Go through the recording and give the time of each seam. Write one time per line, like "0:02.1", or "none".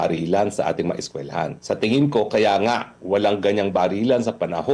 0:01.6